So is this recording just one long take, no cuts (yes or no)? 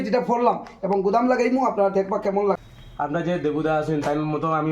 no